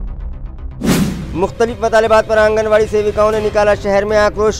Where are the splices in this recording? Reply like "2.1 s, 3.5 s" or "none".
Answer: 1.0 s

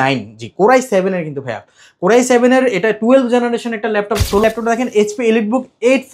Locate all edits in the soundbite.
4.4 s

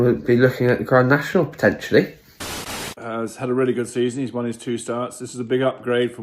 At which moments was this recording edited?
2.7 s

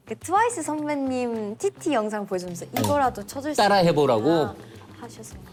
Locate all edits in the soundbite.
none

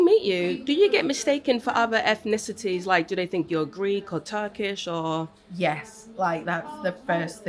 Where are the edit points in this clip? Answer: none

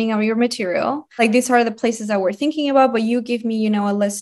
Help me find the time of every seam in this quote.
1.2 s

